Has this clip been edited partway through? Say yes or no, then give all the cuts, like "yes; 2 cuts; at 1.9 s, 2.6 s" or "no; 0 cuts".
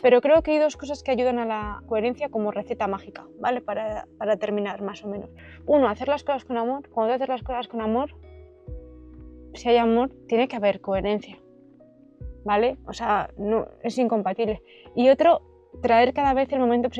yes; 1 cut; at 1.8 s